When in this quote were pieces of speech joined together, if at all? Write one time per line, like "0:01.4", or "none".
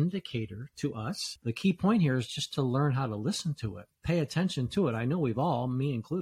0:01.3